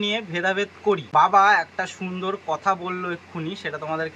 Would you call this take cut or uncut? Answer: cut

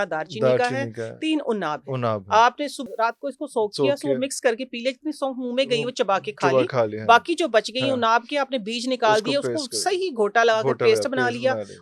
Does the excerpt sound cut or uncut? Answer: cut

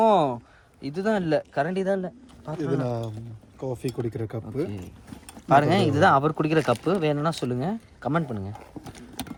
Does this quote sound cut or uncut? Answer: uncut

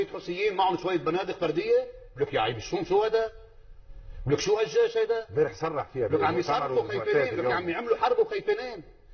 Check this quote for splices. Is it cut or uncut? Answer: uncut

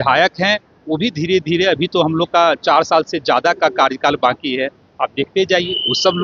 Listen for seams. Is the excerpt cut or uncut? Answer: uncut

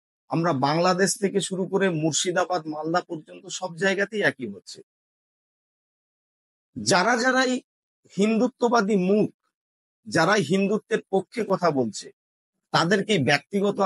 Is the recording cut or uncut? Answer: uncut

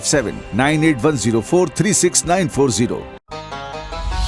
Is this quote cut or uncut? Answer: cut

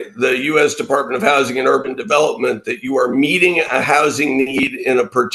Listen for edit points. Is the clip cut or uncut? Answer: uncut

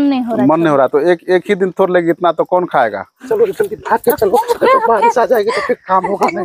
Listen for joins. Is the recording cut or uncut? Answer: cut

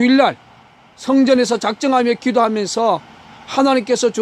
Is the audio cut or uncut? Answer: cut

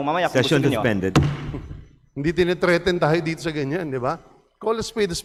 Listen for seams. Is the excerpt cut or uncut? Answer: uncut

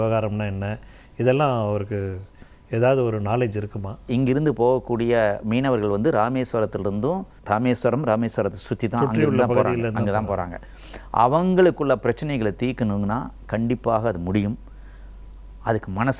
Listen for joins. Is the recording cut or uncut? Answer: cut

